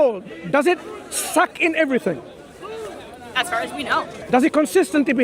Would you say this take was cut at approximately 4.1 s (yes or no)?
yes